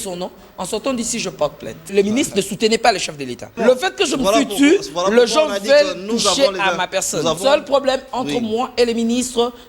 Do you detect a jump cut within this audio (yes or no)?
yes